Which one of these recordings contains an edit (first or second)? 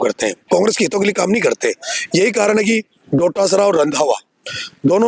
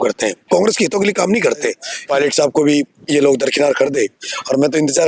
second